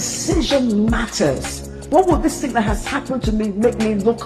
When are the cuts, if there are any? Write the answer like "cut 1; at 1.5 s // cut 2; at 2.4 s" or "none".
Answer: cut 1; at 1.8 s